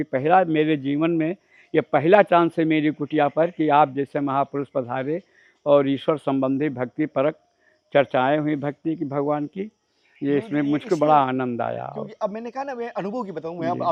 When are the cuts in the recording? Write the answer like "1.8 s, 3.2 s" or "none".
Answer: none